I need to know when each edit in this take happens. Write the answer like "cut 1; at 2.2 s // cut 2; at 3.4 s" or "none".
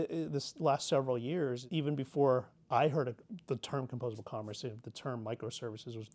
cut 1; at 1.6 s